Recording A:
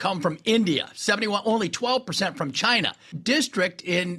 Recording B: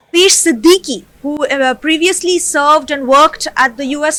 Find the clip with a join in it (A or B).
A